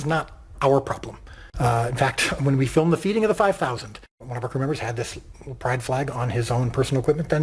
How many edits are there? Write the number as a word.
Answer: two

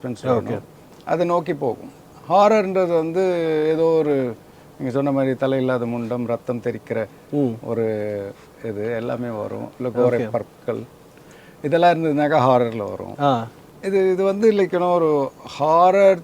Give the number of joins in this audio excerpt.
zero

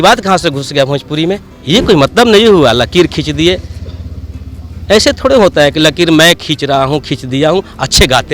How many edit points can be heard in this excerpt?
one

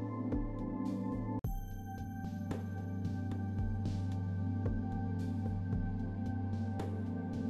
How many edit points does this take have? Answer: zero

